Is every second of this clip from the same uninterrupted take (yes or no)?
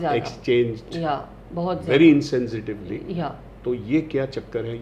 yes